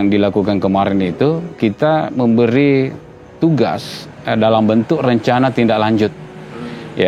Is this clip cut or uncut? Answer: cut